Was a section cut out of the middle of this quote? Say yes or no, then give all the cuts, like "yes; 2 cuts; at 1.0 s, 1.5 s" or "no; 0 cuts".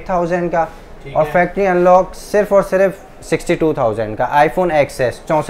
no; 0 cuts